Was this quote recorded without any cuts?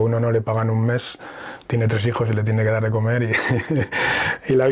yes; 0 cuts

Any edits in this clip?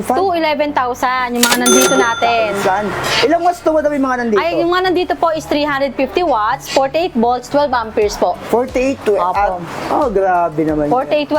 no; 0 cuts

